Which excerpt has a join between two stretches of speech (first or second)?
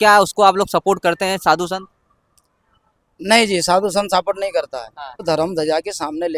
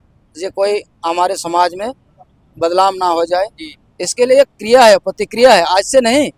first